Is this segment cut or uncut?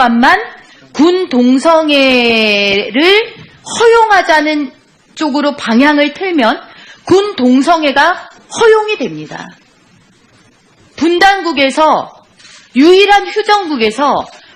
uncut